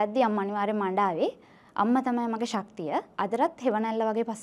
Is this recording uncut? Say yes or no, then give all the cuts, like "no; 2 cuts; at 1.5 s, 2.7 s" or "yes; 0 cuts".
yes; 0 cuts